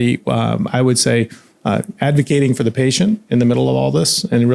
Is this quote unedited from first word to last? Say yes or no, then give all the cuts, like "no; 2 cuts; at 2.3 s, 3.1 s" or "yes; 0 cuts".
yes; 0 cuts